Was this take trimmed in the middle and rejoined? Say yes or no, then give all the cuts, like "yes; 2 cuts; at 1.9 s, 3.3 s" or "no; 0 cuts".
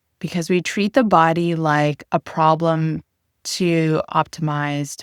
no; 0 cuts